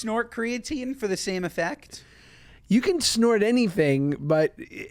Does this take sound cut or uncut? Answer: uncut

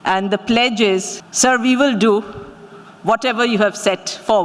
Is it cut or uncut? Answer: cut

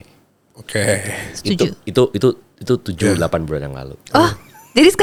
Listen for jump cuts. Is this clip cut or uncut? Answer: uncut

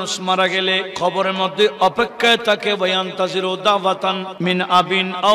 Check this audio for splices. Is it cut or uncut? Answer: cut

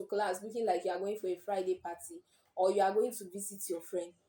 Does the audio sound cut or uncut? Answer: uncut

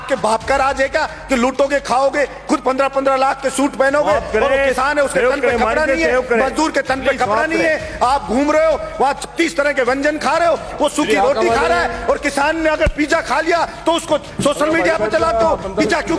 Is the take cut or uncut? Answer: uncut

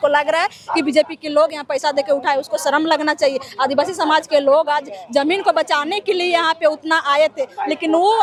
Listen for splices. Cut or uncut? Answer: uncut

